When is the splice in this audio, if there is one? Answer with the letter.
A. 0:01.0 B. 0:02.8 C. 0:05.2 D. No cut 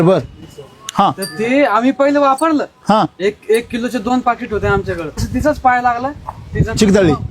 C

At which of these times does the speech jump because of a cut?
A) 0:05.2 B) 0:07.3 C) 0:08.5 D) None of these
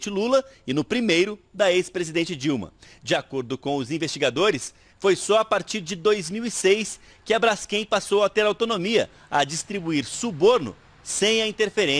A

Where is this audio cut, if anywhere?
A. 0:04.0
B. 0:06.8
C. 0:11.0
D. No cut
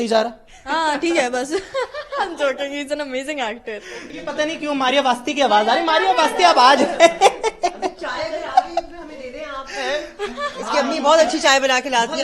A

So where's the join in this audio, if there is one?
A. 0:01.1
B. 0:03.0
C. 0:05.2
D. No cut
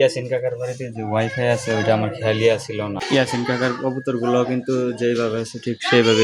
B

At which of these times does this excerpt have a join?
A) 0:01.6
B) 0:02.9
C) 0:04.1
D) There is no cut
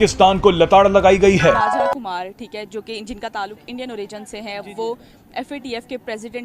A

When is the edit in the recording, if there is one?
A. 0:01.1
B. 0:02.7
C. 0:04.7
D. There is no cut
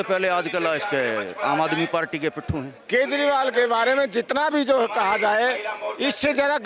B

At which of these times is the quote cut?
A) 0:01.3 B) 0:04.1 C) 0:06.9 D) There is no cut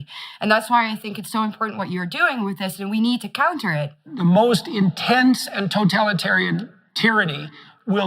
B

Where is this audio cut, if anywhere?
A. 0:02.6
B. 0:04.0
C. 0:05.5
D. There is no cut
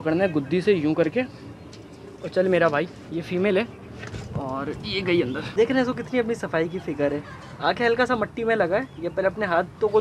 C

